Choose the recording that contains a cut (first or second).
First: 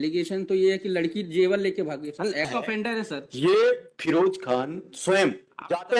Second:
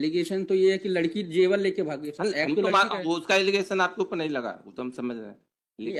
first